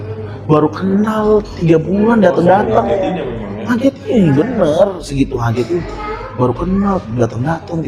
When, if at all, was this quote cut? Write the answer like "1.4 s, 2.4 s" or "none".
none